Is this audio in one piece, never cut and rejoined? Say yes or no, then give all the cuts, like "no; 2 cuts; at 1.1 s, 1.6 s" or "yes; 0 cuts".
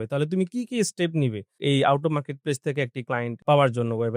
yes; 0 cuts